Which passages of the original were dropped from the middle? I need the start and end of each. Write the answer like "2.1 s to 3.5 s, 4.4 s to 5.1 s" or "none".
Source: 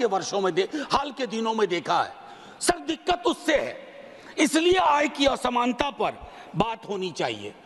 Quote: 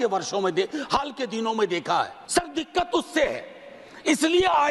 2.2 s to 2.5 s